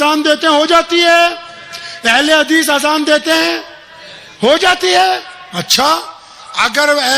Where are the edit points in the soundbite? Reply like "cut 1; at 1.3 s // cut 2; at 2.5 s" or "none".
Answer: none